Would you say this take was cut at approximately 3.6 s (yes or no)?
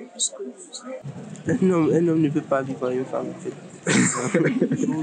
no